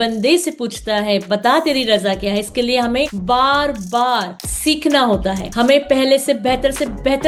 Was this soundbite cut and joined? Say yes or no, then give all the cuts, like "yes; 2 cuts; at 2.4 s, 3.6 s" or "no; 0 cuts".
no; 0 cuts